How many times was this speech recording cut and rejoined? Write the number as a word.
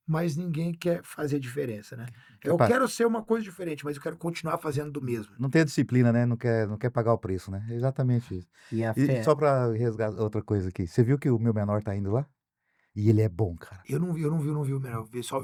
zero